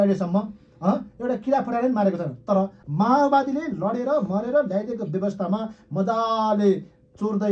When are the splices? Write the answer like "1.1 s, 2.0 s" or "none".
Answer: 2.8 s